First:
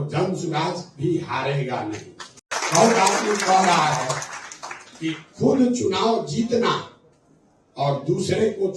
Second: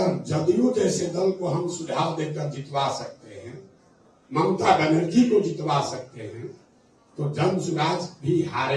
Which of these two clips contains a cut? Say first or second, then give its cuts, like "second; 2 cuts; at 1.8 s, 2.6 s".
first; 1 cut; at 2.5 s